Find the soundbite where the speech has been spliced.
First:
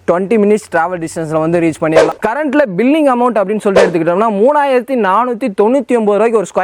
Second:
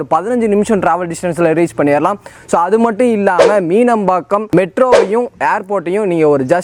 first; 1 cut; at 2.1 s

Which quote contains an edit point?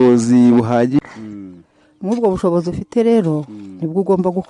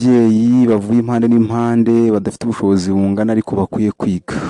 first; 1 cut; at 1.0 s

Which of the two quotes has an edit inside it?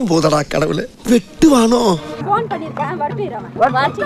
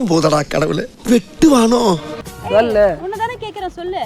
second; 1 cut; at 2.1 s

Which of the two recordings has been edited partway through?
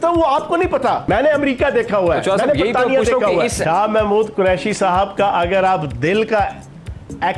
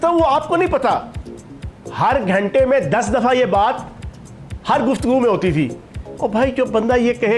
first; 2 cuts; at 1.0 s, 3.6 s

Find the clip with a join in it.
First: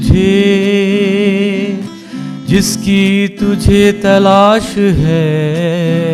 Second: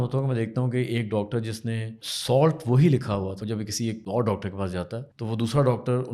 second; 3 cuts; at 2.1 s, 3.8 s, 5.1 s

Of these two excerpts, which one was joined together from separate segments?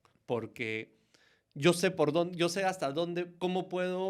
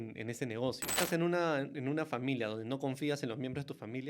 second; 1 cut; at 1.0 s

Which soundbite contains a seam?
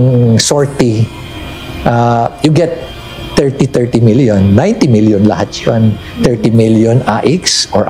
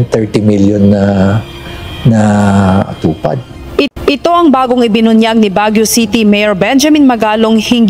second; 1 cut; at 3.9 s

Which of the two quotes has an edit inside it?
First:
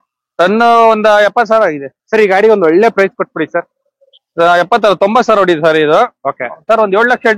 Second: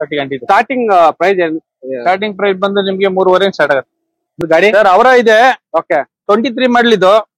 second; 1 cut; at 4.4 s

